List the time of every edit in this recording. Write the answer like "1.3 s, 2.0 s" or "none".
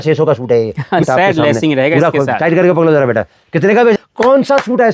1.0 s, 4.0 s